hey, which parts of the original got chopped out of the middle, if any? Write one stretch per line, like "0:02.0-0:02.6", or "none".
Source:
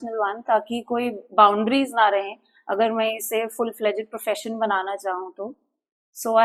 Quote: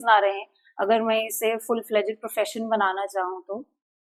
none